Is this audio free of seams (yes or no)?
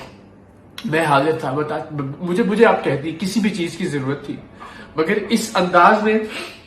yes